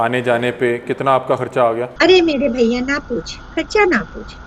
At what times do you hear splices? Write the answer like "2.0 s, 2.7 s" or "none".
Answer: 1.9 s